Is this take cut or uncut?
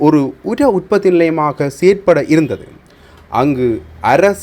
uncut